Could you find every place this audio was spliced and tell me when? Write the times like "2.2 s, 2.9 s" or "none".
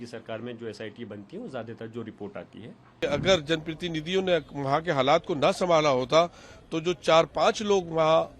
2.7 s